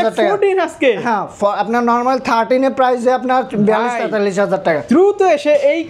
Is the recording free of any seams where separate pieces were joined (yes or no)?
yes